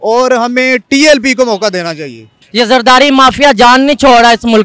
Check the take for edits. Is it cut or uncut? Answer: cut